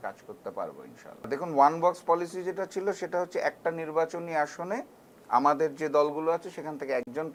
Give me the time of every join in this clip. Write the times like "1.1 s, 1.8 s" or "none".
none